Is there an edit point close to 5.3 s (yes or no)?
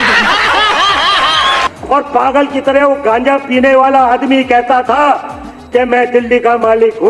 no